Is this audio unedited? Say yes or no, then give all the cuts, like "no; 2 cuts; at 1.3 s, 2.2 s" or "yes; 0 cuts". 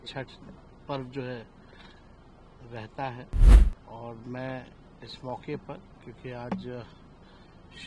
no; 1 cut; at 3.6 s